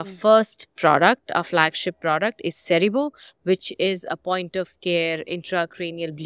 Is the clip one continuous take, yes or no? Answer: yes